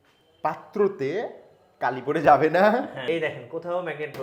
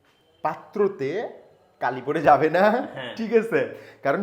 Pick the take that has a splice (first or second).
first